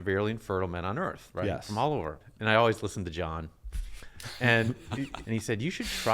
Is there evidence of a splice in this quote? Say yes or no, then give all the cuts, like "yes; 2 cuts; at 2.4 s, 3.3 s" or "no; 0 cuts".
yes; 2 cuts; at 2.3 s, 5.2 s